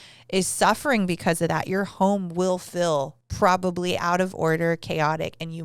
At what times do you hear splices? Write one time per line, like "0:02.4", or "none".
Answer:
0:03.2